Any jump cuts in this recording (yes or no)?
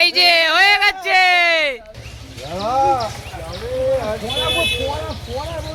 no